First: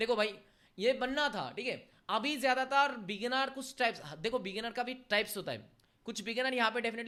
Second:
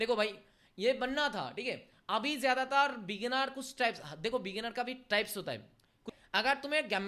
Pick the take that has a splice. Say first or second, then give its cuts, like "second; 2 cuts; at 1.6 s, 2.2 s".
second; 1 cut; at 6.1 s